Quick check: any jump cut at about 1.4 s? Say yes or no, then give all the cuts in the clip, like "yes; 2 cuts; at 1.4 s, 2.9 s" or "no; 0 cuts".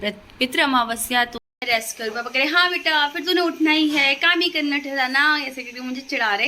yes; 1 cut; at 1.4 s